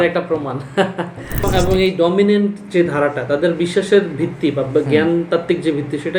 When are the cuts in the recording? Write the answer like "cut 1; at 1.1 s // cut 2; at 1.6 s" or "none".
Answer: cut 1; at 1.5 s